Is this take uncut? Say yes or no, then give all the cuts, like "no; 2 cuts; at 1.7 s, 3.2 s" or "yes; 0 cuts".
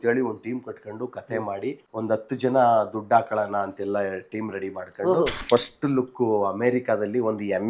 no; 2 cuts; at 1.8 s, 5.4 s